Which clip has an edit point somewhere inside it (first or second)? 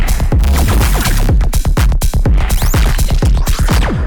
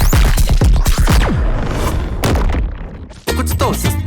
second